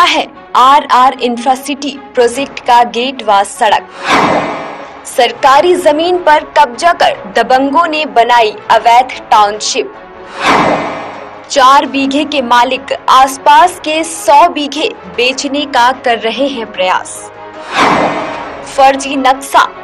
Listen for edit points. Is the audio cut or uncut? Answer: cut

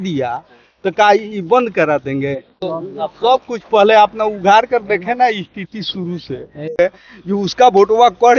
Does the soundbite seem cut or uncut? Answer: cut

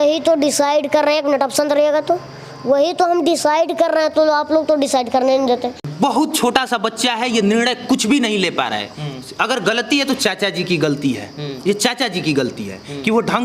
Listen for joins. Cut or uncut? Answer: cut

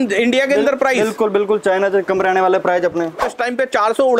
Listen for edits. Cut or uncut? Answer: cut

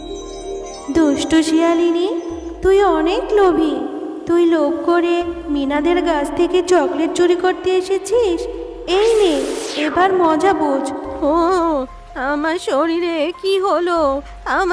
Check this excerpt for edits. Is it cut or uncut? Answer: cut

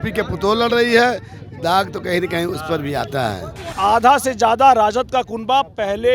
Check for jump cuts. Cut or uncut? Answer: cut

